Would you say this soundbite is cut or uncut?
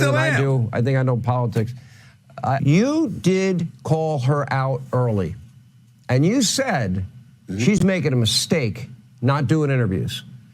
cut